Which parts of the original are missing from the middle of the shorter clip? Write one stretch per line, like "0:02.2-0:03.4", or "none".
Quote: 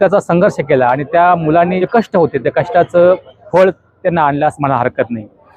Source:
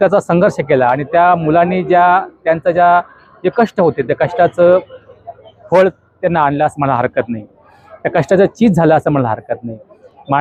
0:01.8-0:03.4
0:05.0-0:05.5